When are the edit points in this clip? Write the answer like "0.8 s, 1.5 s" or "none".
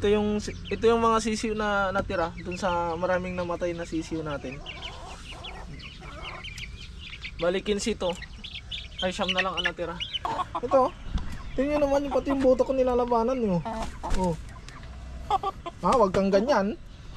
10.2 s